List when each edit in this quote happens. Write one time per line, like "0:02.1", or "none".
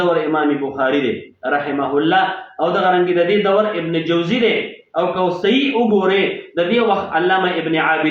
none